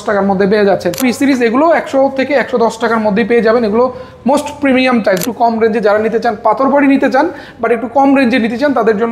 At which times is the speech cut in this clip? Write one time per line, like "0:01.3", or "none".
0:01.0
0:05.2